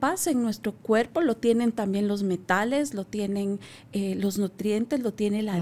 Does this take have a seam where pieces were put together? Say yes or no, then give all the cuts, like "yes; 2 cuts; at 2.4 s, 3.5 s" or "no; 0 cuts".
no; 0 cuts